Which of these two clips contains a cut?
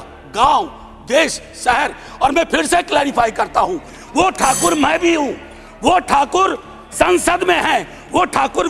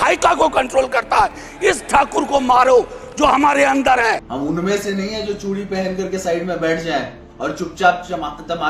second; 1 cut; at 4.2 s

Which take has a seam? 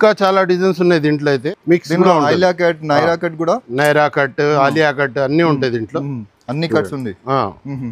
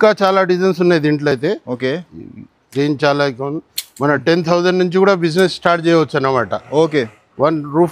first; 1 cut; at 1.3 s

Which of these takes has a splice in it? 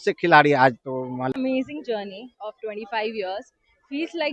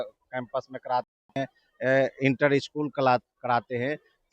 first; 1 cut; at 1.3 s

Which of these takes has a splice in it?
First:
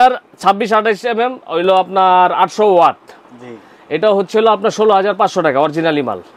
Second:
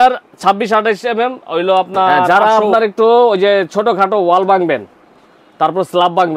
second; 1 cut; at 2.3 s

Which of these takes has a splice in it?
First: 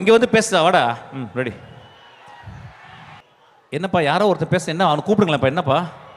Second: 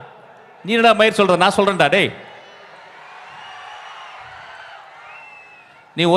first; 1 cut; at 3.2 s

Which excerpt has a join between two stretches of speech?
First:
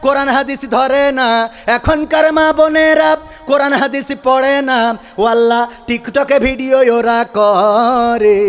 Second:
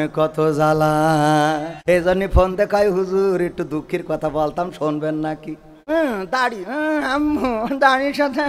second; 2 cuts; at 1.7 s, 5.7 s

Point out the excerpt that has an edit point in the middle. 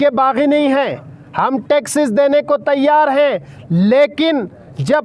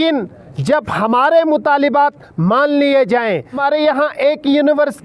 second; 1 cut; at 3.5 s

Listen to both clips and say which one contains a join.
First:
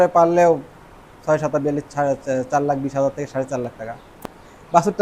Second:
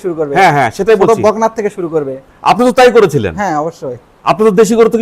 first; 1 cut; at 4.0 s

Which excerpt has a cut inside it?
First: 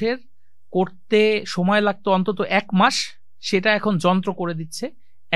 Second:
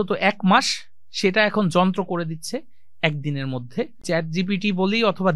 second; 1 cut; at 4.0 s

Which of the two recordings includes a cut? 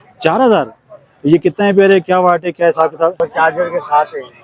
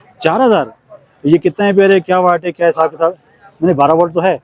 first; 1 cut; at 3.2 s

